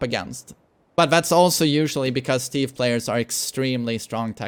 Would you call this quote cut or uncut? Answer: uncut